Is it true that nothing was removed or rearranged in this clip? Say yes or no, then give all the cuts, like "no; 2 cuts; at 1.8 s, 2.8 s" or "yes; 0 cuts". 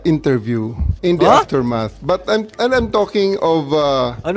yes; 0 cuts